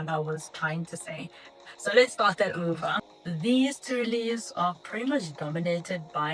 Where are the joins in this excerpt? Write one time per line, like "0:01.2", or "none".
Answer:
0:03.1